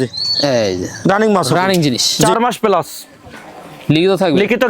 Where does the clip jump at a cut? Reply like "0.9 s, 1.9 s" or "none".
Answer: 2.1 s